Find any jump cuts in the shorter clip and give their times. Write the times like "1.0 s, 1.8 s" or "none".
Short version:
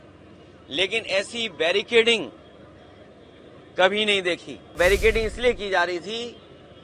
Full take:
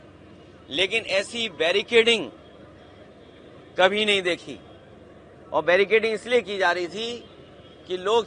4.8 s